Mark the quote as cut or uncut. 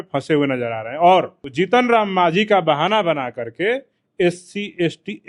cut